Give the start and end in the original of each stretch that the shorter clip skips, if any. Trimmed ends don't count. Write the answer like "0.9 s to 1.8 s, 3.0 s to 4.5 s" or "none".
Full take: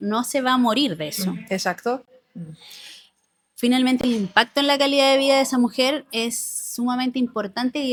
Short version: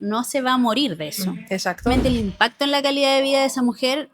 1.9 s to 3.8 s